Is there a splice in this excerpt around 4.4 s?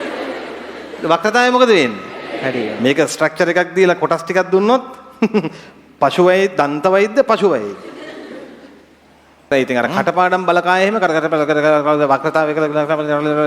no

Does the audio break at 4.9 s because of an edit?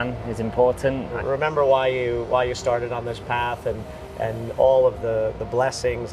no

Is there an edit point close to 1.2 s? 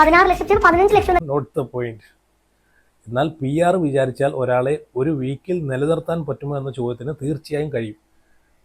yes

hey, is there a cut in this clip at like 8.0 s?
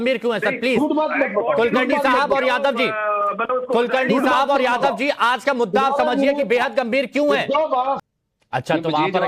yes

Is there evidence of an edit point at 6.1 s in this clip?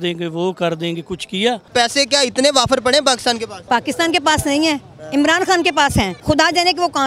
yes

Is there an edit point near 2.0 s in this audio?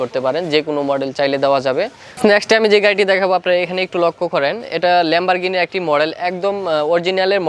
no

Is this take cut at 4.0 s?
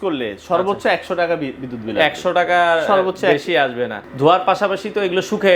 yes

